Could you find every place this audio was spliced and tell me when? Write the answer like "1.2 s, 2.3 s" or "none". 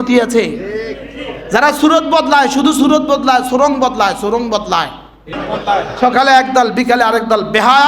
5.3 s